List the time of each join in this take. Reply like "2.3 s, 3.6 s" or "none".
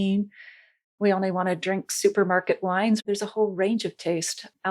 3.0 s